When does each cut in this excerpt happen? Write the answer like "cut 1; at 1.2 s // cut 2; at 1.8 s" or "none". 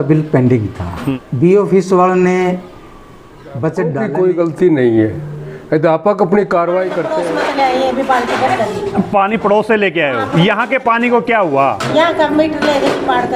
cut 1; at 1.0 s // cut 2; at 4.0 s // cut 3; at 7.1 s